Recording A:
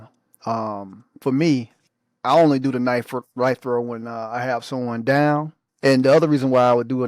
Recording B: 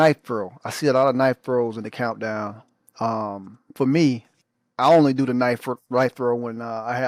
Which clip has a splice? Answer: A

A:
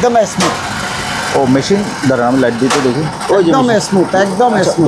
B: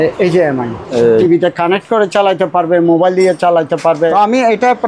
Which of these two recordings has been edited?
B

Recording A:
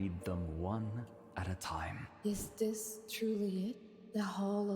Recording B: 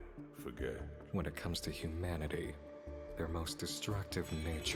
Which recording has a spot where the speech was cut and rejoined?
A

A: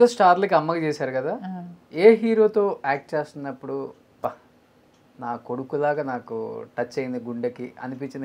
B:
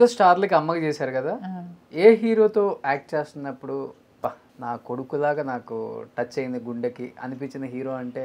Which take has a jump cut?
B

